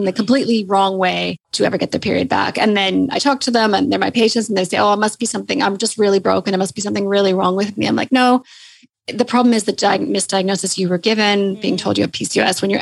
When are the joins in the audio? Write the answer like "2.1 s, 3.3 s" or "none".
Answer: 1.4 s